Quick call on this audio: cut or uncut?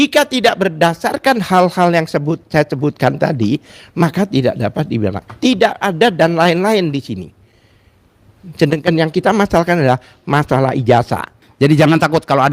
cut